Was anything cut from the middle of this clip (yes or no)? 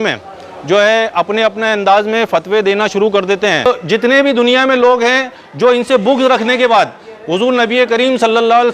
yes